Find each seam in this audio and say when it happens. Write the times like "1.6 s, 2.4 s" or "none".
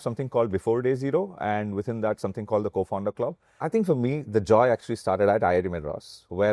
3.5 s